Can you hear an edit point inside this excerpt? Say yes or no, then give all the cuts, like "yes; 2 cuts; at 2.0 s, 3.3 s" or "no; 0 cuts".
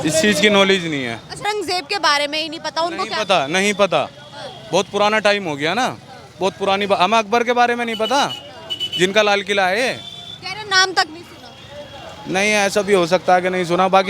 yes; 1 cut; at 1.5 s